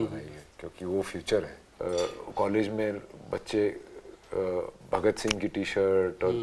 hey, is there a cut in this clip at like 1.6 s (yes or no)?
yes